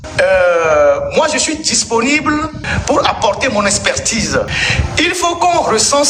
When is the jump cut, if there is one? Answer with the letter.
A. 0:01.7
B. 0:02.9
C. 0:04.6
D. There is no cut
C